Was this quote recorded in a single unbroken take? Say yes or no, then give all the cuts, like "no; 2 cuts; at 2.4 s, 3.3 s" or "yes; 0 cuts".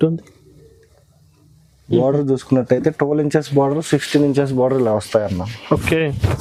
yes; 0 cuts